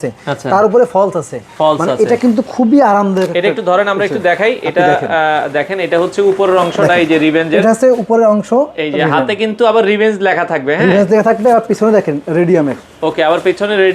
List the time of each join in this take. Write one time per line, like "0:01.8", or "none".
none